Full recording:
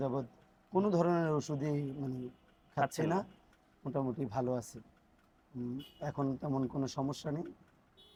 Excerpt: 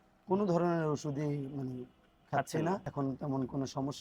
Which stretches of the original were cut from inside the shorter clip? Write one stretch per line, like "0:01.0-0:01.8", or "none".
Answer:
0:03.3-0:06.1

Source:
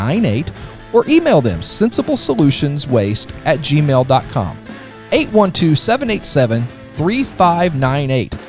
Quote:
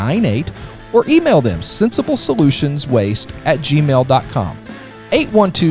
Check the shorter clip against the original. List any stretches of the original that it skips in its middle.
none

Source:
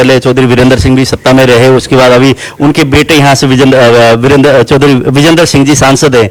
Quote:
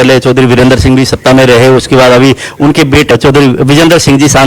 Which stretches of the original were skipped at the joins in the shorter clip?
0:03.1-0:04.6

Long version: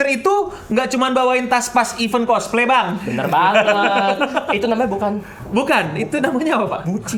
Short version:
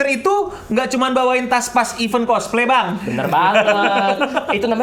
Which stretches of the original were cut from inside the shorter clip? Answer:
none

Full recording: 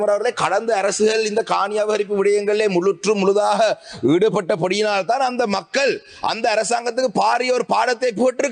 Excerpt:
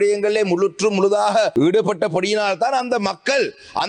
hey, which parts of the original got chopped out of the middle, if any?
0:03.7-0:04.0

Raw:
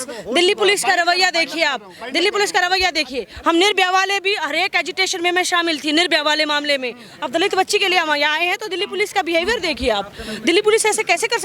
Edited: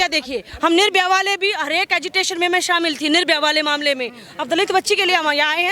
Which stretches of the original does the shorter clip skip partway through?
none

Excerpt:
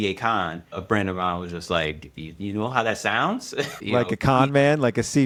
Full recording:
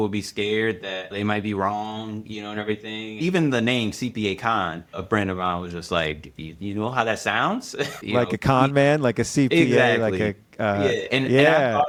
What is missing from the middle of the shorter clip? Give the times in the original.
none

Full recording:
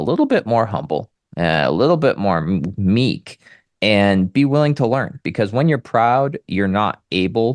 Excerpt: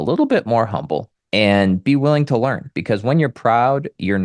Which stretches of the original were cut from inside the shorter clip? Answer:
0:01.2-0:03.6

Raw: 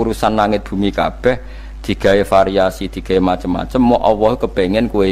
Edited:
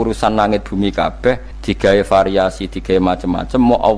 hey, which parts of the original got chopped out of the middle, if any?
0:01.5-0:01.7

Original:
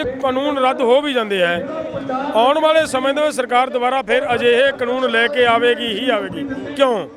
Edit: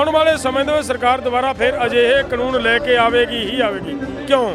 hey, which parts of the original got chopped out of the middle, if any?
none

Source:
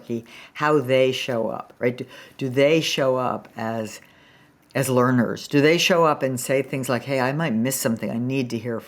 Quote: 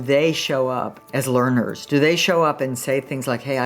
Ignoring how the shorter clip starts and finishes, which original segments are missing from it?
0:03.5-0:04.6

